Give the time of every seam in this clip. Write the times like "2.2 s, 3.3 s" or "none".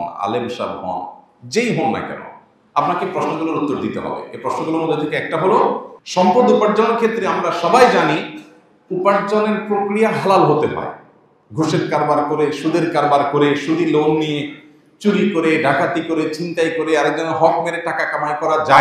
5.9 s

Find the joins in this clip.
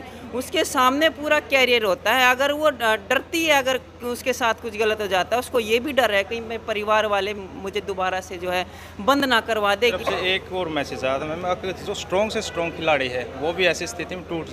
10.0 s

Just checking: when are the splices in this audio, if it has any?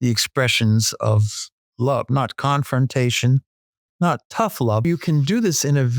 4.8 s

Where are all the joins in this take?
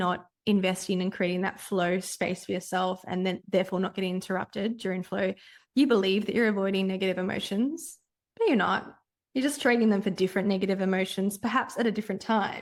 none

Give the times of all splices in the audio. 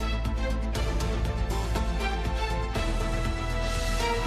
0.9 s

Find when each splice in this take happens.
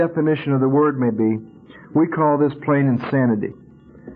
none

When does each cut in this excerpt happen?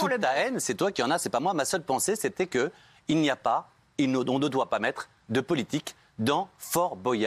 none

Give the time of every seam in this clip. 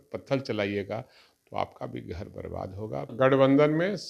3.1 s

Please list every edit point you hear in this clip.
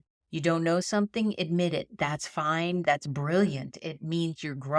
none

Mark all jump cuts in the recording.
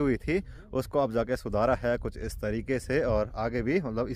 none

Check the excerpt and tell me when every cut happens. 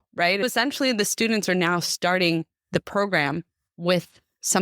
none

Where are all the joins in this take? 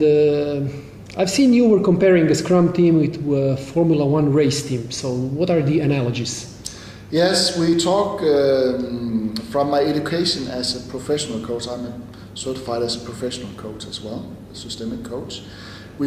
none

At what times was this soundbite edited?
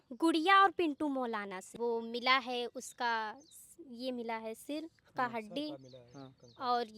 1.6 s

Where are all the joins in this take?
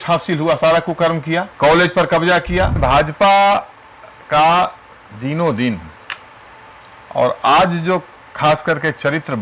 1.5 s, 2.8 s

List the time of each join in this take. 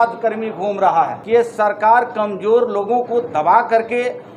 1.2 s

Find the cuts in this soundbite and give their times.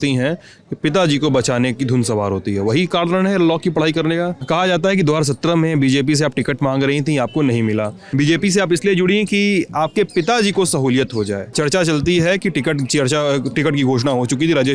4.4 s, 8.0 s, 11.5 s

